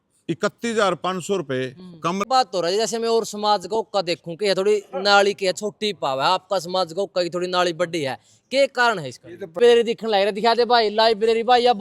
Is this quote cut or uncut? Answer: cut